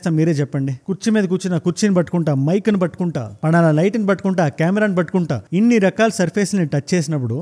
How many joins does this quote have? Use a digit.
0